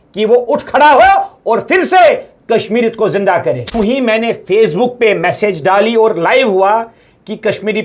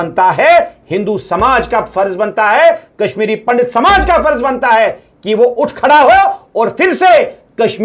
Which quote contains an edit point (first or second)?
first